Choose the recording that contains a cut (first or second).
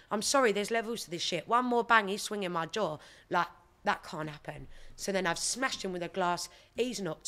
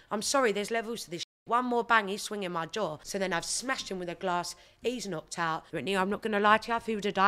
second